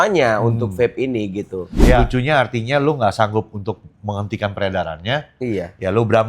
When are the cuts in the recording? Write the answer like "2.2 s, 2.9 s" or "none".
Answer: 2.1 s